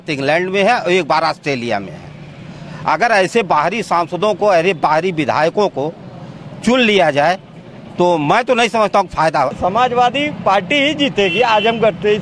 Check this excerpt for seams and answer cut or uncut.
cut